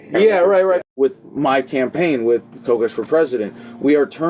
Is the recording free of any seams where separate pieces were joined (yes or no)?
no